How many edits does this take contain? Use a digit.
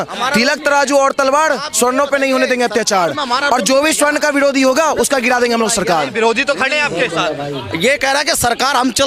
0